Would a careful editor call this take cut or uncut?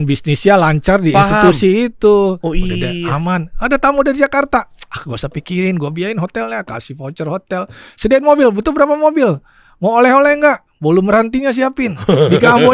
uncut